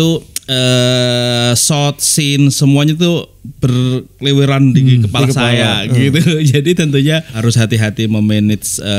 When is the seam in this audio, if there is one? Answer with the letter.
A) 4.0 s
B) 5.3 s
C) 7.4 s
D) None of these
C